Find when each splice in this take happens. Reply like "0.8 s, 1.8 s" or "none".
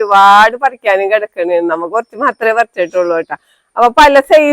none